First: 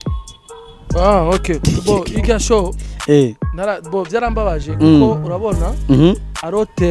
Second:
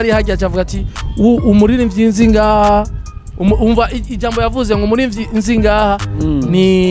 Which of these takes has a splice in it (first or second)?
first